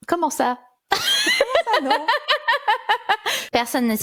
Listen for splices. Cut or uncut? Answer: uncut